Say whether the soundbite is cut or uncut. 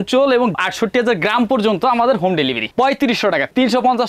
cut